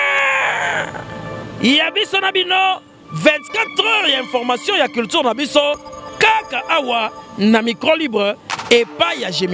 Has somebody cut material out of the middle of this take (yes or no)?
no